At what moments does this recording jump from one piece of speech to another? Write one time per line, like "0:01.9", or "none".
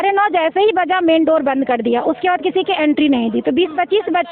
none

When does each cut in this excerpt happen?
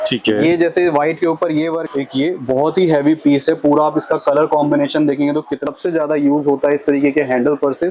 0:01.8
0:05.6

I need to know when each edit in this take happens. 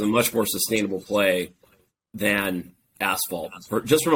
none

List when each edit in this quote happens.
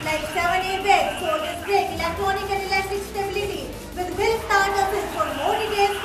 none

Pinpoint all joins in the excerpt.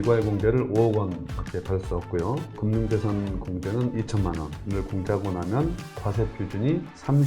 0:02.6
0:04.6

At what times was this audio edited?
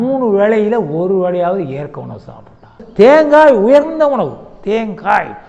0:02.8

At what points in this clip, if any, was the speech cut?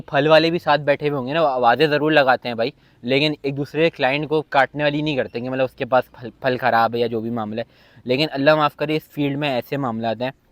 none

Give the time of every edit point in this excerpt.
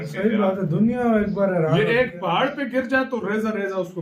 none

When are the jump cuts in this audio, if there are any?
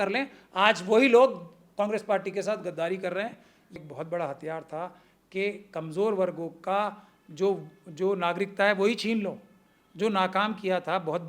0:03.8

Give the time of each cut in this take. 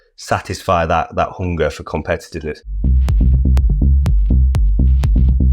0:02.7

